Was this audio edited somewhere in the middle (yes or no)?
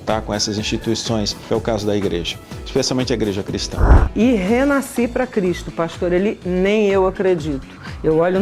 yes